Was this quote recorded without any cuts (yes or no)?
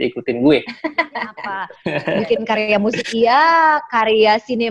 no